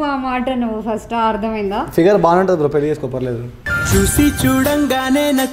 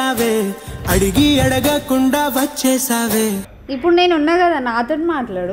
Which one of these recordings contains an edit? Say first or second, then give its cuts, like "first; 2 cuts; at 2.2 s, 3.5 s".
second; 1 cut; at 3.5 s